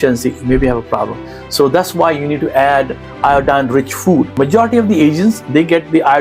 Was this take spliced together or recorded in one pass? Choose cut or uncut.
cut